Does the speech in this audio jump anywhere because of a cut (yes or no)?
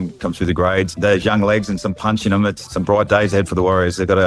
yes